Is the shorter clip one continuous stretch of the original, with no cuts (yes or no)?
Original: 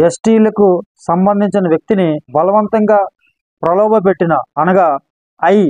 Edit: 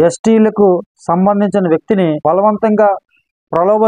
no